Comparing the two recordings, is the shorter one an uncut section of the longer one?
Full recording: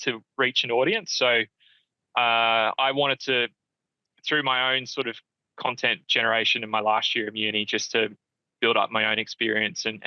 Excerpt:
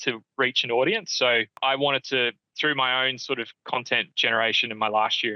no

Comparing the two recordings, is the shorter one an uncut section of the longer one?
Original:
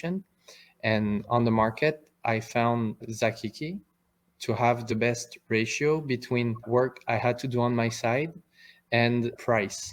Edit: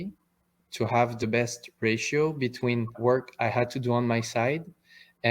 yes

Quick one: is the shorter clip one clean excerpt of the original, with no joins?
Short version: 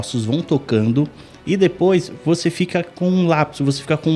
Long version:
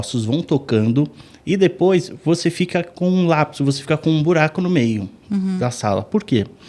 yes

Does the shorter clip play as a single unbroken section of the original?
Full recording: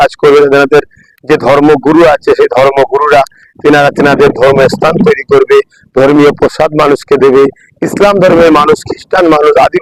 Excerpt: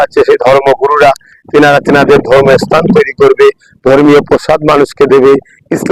yes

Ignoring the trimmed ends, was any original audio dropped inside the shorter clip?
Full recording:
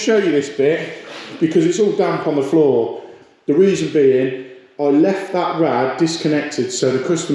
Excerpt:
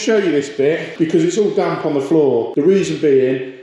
yes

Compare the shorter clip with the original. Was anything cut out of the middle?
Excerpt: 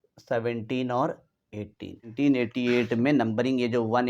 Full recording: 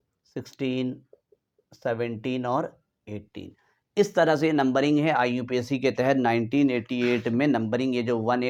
yes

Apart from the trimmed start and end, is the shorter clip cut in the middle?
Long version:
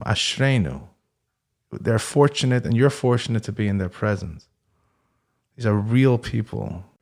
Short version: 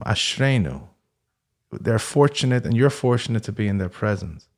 no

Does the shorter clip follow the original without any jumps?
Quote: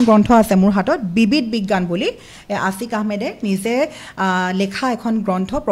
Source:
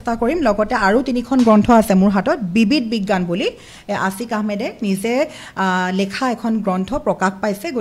yes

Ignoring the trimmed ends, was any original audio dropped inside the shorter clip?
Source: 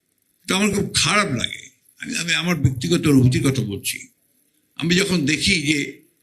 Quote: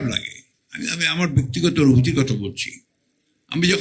no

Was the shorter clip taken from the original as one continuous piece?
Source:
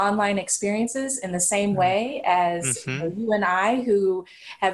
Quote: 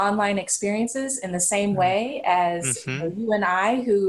yes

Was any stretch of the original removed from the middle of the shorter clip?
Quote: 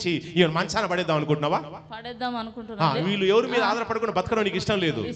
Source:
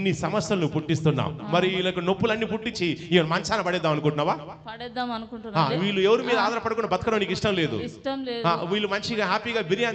no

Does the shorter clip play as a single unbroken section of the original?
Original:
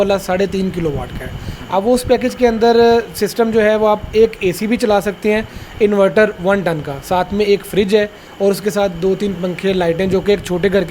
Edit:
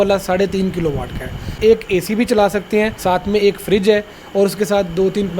no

